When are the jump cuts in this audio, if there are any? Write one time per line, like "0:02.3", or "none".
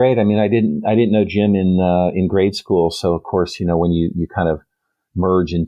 none

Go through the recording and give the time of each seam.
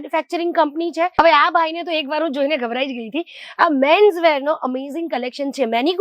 0:01.1

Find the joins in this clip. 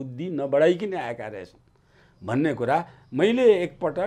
none

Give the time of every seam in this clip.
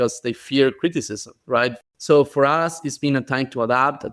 0:01.8

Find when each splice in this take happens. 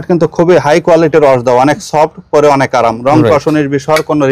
none

